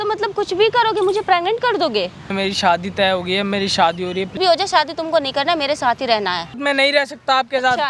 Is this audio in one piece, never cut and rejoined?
no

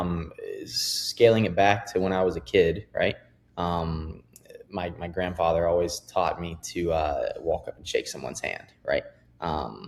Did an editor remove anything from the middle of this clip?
no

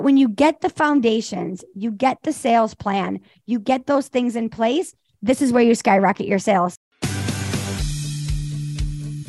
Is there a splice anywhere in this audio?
yes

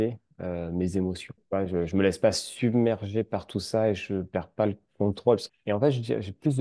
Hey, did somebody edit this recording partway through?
yes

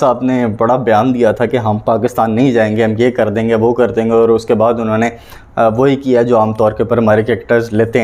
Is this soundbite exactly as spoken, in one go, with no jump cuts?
yes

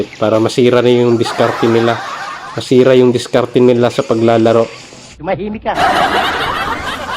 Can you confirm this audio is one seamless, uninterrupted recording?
yes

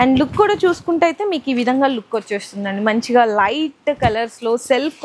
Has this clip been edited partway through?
no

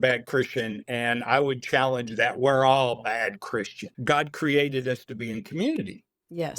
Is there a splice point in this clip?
yes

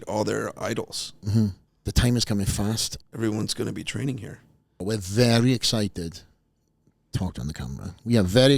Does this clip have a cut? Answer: yes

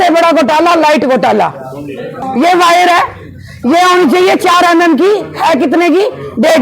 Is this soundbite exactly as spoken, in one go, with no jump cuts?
no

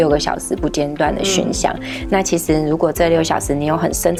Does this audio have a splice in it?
no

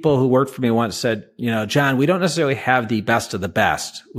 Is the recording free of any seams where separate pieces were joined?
yes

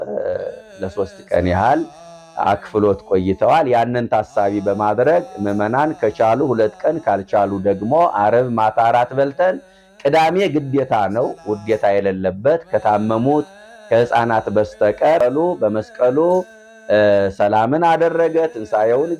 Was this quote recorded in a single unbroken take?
no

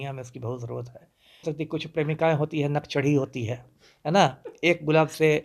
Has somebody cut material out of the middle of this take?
yes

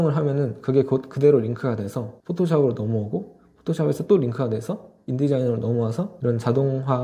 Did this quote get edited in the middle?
no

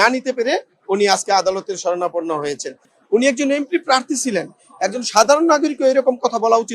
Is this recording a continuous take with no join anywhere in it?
no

